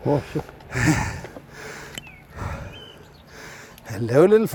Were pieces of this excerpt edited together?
no; 0 cuts

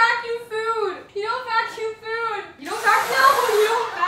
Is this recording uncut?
no; 2 cuts; at 1.0 s, 2.5 s

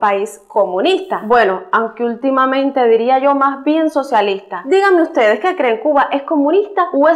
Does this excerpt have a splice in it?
no; 0 cuts

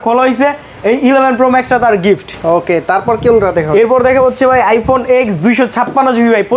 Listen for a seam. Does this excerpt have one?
no; 0 cuts

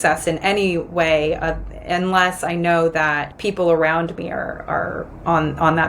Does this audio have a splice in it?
yes; 1 cut; at 3.3 s

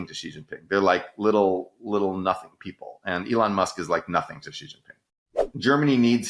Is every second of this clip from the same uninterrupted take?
no; 1 cut; at 5.2 s

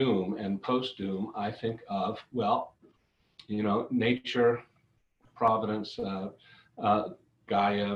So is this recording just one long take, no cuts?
yes; 0 cuts

